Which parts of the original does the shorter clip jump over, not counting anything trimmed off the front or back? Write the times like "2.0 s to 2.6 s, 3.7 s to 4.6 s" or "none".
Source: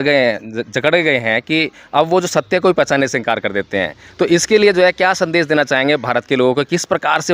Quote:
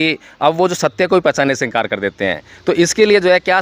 none